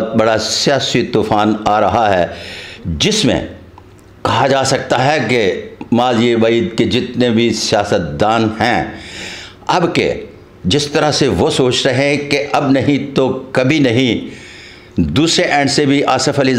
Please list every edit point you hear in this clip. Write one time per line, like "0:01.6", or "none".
none